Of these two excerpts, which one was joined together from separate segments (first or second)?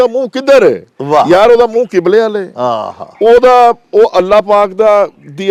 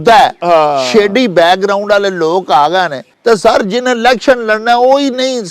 second